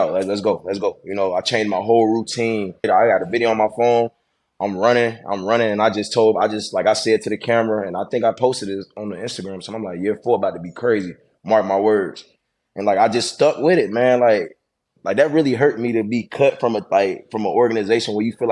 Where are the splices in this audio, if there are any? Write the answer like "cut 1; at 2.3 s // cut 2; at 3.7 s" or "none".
cut 1; at 2.9 s